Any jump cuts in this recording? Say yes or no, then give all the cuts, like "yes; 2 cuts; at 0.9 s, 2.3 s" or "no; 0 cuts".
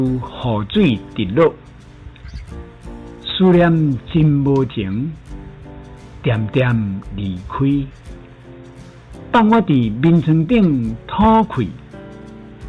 no; 0 cuts